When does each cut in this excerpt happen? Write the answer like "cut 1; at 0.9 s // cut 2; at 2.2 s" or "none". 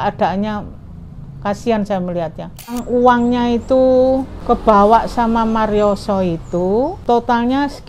cut 1; at 2.8 s // cut 2; at 4.3 s // cut 3; at 7.0 s